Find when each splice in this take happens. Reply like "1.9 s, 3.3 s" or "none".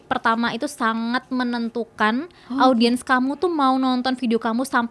none